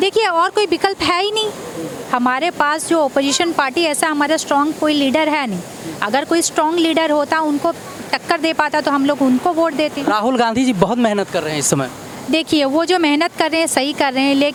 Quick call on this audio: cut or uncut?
uncut